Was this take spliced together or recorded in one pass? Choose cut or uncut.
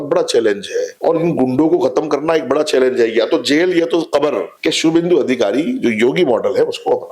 cut